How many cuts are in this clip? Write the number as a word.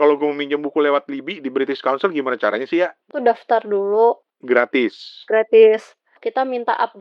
three